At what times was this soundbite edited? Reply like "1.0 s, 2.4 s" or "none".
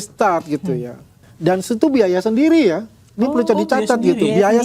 1.3 s

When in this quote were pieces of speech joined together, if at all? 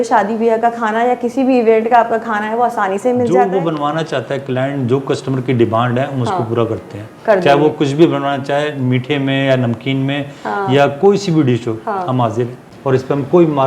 3.5 s, 12.6 s

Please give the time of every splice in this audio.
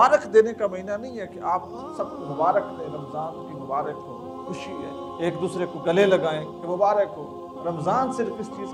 none

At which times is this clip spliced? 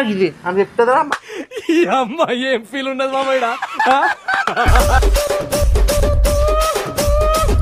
1.0 s

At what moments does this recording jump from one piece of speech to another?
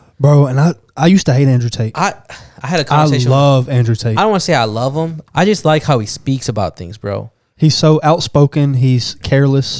5.2 s

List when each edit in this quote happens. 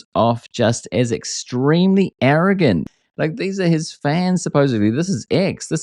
2.9 s

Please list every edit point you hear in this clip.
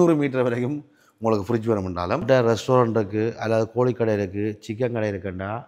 2.2 s

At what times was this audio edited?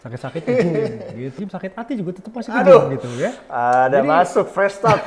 1.3 s

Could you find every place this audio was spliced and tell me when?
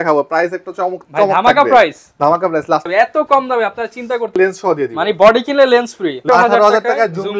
2.9 s, 4.4 s, 6.2 s

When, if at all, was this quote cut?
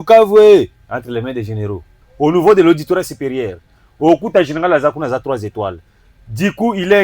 2.0 s

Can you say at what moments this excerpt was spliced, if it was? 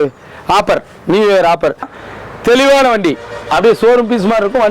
1.9 s

